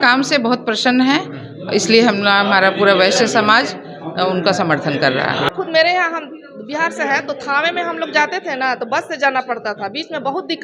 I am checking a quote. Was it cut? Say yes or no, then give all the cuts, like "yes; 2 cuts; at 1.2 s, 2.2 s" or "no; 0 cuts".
yes; 1 cut; at 5.5 s